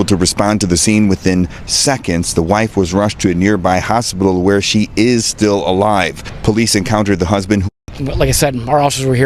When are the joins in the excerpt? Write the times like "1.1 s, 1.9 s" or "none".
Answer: 8.0 s